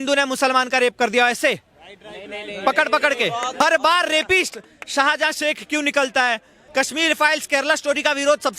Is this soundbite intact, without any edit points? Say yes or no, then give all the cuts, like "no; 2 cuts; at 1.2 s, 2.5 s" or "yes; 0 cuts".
no; 2 cuts; at 3.5 s, 6.6 s